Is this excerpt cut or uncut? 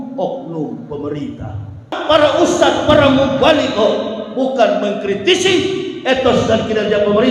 cut